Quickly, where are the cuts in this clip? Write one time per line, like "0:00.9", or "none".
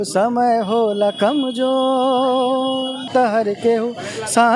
0:03.1